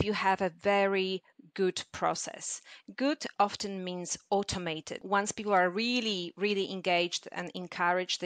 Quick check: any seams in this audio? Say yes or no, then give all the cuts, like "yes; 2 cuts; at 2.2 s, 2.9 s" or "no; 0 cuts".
yes; 1 cut; at 4.9 s